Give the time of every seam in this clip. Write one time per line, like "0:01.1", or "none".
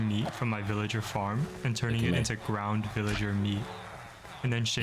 none